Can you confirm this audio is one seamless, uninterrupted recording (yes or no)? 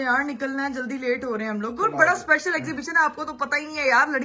yes